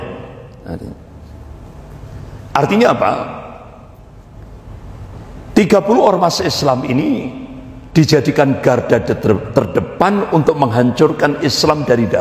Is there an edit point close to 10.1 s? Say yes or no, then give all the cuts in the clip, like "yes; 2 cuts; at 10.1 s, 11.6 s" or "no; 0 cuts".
no; 0 cuts